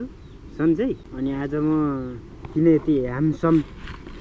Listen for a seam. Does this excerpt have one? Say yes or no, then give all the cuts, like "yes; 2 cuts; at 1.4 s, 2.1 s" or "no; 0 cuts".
yes; 1 cut; at 1.1 s